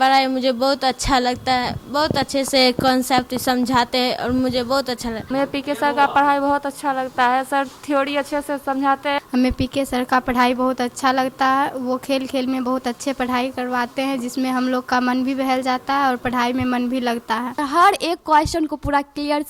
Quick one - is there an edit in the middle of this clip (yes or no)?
yes